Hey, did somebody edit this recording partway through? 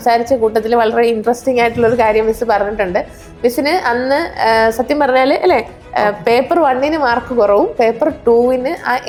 no; 0 cuts

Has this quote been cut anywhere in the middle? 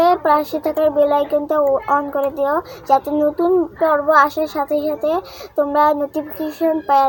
no; 0 cuts

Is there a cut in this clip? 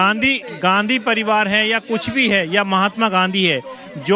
no; 0 cuts

